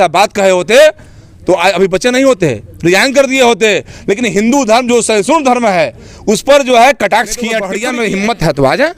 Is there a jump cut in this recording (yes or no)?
yes